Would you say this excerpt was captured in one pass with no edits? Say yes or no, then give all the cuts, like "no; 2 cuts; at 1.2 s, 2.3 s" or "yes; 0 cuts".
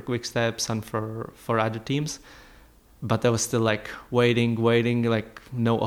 yes; 0 cuts